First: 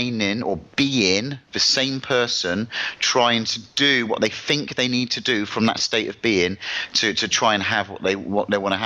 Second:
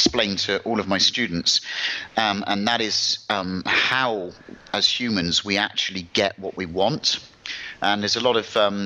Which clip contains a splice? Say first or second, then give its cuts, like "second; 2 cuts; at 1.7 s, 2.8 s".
first; 1 cut; at 3.0 s